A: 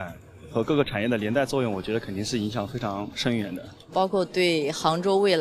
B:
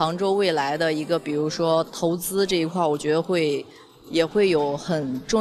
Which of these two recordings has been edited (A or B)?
A